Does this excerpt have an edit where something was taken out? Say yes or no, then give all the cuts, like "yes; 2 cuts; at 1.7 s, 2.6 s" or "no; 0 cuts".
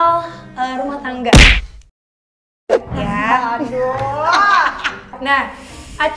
no; 0 cuts